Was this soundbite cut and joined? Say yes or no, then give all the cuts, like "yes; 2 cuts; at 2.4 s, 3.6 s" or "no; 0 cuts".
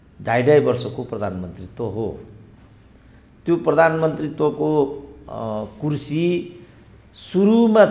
no; 0 cuts